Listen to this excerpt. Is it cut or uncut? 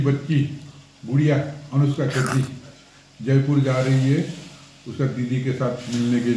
uncut